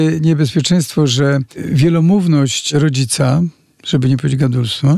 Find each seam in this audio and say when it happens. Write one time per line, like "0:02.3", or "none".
0:01.6
0:02.7